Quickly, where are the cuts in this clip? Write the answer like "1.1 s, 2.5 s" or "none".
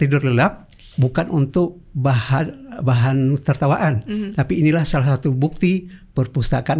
none

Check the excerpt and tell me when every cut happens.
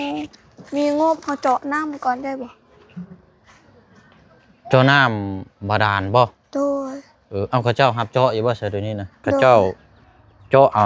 9.4 s

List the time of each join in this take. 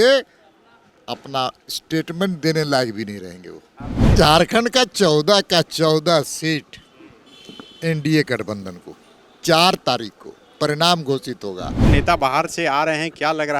4.1 s, 11.9 s

